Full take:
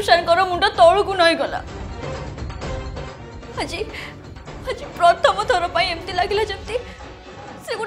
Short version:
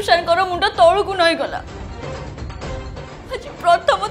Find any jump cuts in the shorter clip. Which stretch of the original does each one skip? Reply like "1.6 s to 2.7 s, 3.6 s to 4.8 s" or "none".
3.1 s to 4.5 s